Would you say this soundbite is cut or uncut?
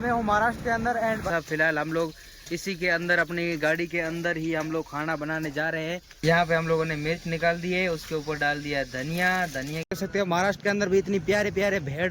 cut